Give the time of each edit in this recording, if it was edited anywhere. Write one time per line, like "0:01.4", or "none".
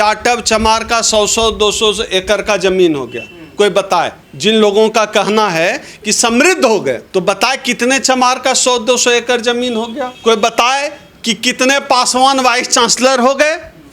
0:04.2
0:07.0
0:10.1